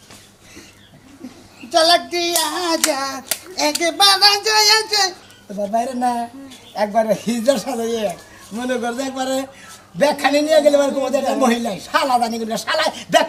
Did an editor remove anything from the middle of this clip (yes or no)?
no